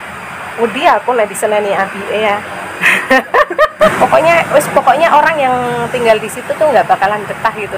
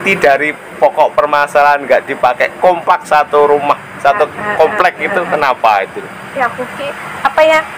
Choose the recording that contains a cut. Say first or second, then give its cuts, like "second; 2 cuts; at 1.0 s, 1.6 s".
first; 1 cut; at 3.9 s